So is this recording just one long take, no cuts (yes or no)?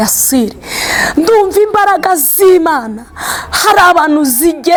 yes